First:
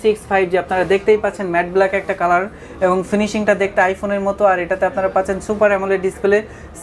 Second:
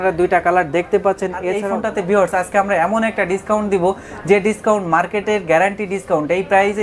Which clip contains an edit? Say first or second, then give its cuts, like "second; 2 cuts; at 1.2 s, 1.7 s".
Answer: second; 1 cut; at 1.5 s